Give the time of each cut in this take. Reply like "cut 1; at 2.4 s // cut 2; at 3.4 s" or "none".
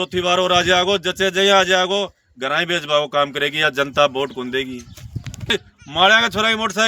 cut 1; at 5.5 s

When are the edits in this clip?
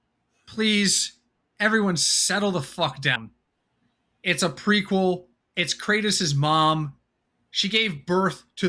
cut 1; at 3.2 s

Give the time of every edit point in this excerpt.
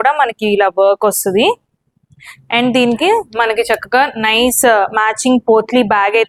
none

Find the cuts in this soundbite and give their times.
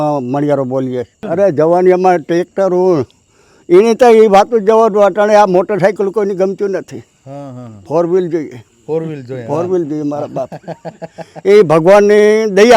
cut 1; at 1.2 s

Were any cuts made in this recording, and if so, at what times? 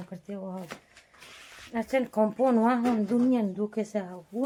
none

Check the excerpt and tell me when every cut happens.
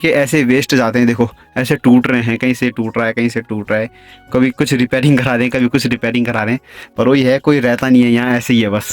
none

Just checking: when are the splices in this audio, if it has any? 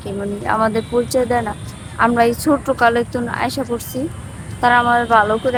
none

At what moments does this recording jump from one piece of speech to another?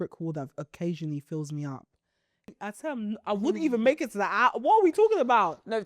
cut 1; at 2.5 s

